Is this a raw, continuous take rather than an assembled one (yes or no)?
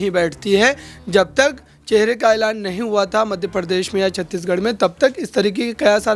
yes